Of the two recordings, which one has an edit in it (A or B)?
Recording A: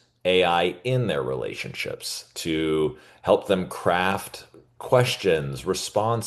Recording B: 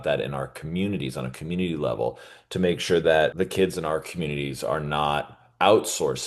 B